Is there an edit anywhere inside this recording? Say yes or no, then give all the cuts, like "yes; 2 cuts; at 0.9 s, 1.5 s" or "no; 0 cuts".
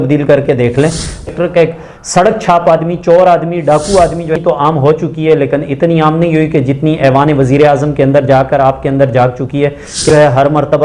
yes; 3 cuts; at 1.3 s, 4.4 s, 10.0 s